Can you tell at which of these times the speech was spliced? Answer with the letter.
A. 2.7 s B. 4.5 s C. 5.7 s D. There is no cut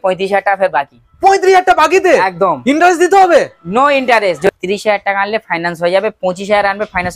B